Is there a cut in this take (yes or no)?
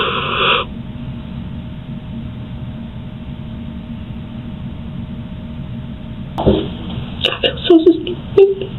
yes